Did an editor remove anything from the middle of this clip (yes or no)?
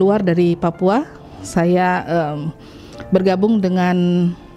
no